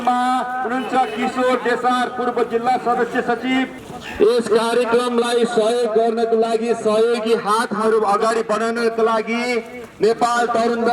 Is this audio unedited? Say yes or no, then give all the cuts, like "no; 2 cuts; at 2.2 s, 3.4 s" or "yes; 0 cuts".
no; 1 cut; at 4.0 s